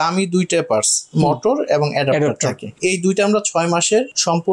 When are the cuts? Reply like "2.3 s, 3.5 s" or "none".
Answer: none